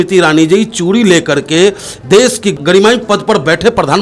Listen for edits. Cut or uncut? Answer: cut